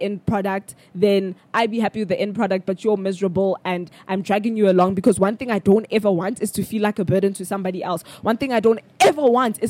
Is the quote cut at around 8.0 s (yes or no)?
no